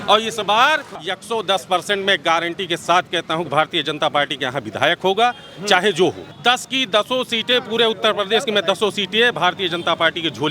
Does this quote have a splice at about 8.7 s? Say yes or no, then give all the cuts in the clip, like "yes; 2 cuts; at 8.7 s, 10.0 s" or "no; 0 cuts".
no; 2 cuts; at 1.0 s, 6.3 s